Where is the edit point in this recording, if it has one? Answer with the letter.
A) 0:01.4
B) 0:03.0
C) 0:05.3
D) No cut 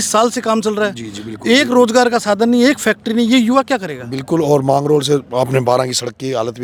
D